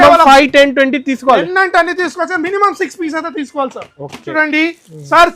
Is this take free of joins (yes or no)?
no